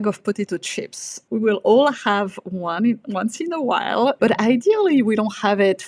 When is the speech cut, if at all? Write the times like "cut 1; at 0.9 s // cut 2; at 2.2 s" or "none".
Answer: cut 1; at 1.1 s // cut 2; at 4.2 s